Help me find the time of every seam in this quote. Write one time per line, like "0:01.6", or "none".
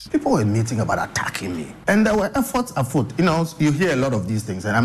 0:01.7